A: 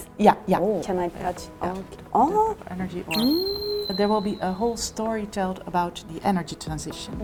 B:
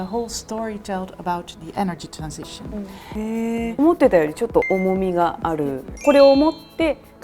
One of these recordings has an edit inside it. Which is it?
B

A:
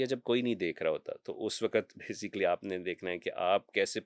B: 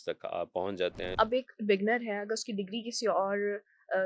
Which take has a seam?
B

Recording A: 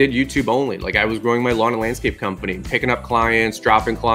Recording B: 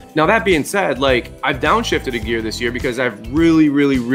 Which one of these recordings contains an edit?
B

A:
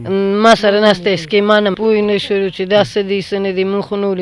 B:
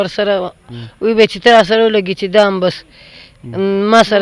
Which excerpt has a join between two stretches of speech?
A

